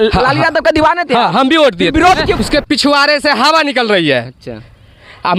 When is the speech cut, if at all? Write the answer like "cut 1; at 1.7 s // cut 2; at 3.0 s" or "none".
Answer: cut 1; at 2.4 s